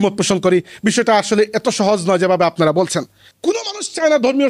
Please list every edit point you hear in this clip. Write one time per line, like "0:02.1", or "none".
0:03.3

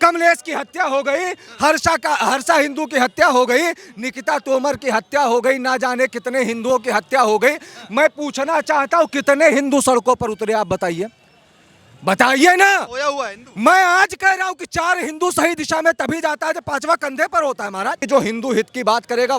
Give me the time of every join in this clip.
0:18.0

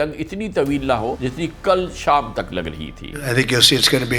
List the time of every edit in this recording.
0:01.2
0:03.2

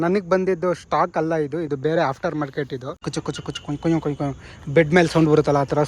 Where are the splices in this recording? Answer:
0:03.1

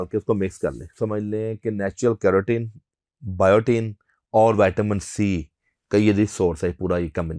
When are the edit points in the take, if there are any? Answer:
0:00.9

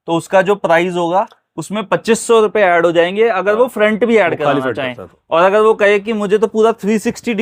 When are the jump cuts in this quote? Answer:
none

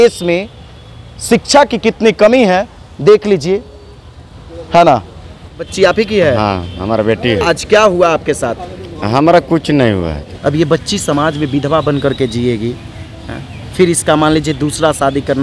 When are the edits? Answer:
0:05.7
0:10.2

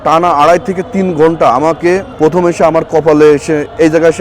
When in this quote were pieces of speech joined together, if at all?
0:02.1

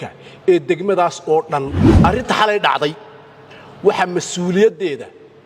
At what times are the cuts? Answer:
0:01.8

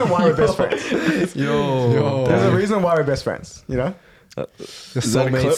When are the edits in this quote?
none

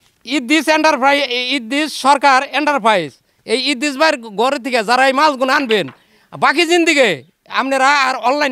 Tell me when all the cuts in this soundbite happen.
none

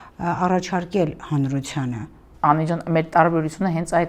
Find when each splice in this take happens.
none

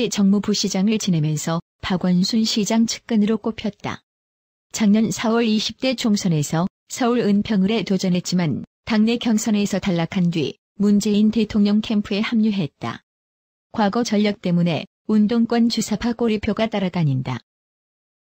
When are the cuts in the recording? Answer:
0:02.3

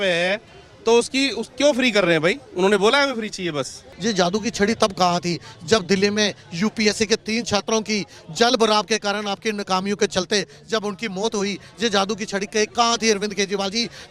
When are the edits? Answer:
0:03.9

